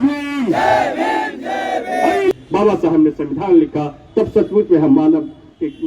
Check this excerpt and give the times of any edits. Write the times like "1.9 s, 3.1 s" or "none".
2.3 s